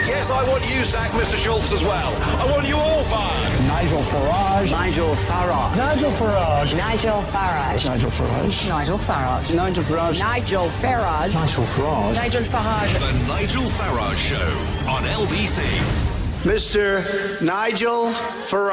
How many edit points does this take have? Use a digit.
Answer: 0